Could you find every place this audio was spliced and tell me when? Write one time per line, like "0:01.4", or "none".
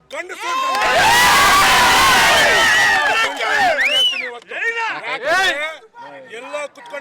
none